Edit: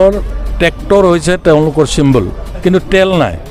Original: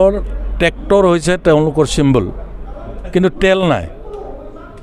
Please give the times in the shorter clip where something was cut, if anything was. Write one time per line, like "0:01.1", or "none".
0:02.4